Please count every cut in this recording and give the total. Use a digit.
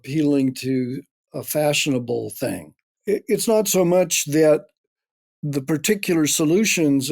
1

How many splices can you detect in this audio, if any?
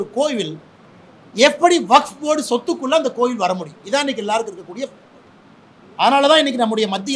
0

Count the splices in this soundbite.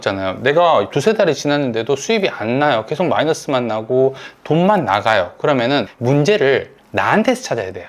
1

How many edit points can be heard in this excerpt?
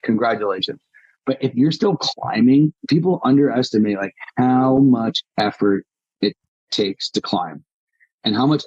1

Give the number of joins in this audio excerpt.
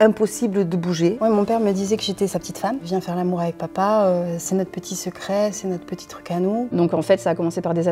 2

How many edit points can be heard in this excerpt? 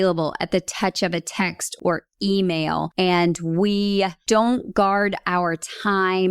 3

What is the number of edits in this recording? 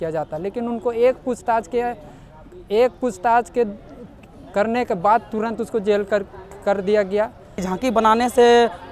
1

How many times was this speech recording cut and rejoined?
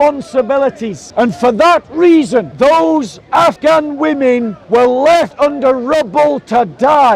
5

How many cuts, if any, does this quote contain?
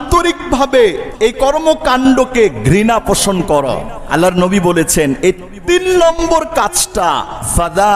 2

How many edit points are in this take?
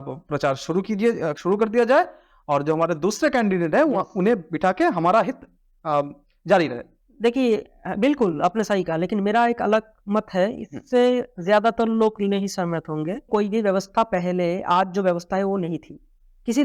1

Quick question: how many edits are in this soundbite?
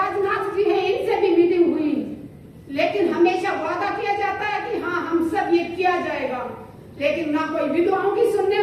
0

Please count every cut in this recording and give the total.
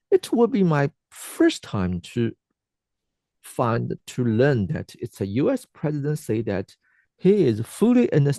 0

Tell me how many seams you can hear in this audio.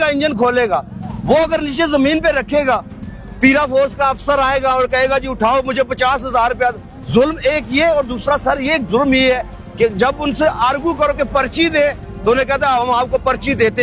0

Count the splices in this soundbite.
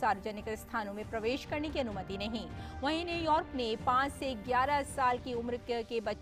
0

